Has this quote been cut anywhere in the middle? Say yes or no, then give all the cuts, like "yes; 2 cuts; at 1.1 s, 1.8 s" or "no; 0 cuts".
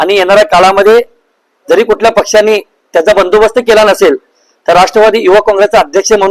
no; 0 cuts